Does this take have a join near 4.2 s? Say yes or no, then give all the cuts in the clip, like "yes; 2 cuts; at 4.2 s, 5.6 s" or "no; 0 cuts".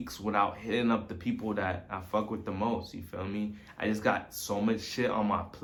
no; 0 cuts